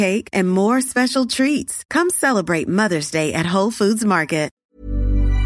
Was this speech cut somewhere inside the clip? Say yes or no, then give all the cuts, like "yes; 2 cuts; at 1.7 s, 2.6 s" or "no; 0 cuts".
yes; 1 cut; at 4.6 s